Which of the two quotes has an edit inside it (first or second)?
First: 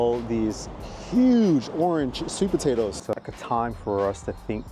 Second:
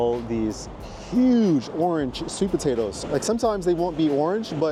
first